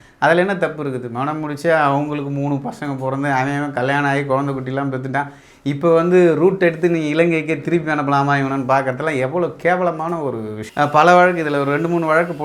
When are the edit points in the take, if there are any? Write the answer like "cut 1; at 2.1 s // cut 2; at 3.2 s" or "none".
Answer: cut 1; at 10.6 s